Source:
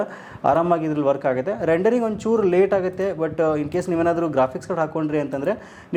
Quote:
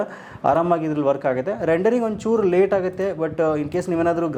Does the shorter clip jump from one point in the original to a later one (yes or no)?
no